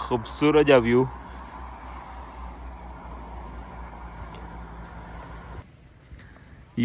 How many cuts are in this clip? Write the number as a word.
one